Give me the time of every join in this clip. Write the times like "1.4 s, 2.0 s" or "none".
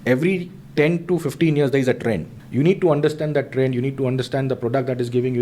2.4 s